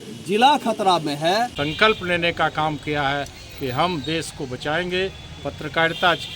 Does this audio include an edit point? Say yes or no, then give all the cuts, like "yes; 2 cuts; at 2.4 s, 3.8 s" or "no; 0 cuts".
yes; 1 cut; at 1.6 s